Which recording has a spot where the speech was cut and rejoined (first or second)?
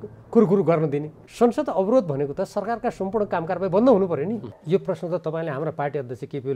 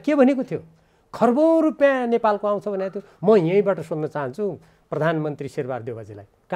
first